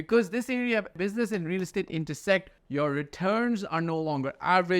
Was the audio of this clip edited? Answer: yes; 2 cuts; at 1.0 s, 2.6 s

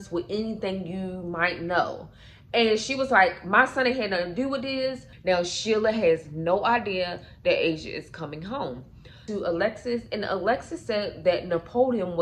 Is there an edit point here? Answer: yes; 2 cuts; at 5.1 s, 9.2 s

